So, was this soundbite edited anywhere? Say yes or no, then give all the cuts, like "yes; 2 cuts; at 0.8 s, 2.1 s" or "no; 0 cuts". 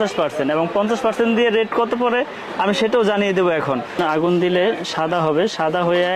yes; 1 cut; at 4.0 s